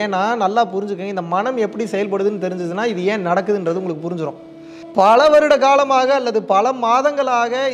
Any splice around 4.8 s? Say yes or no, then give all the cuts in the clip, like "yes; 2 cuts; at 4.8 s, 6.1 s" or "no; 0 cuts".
yes; 1 cut; at 4.8 s